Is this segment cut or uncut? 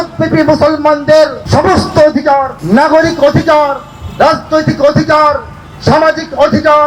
cut